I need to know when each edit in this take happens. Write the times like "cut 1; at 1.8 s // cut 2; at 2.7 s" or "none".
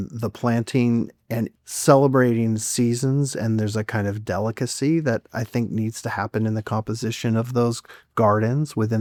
none

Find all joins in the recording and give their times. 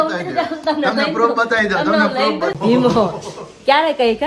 cut 1; at 2.6 s

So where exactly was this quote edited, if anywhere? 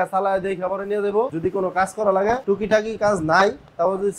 cut 1; at 1.3 s // cut 2; at 2.4 s

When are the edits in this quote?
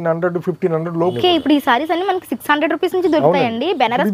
cut 1; at 1.2 s

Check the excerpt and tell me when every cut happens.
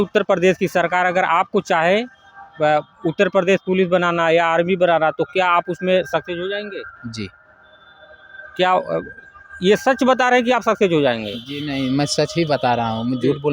none

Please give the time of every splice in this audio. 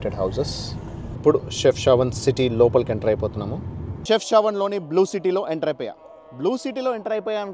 cut 1; at 1.1 s // cut 2; at 3.9 s

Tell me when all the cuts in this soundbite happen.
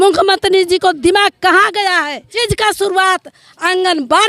cut 1; at 2.4 s

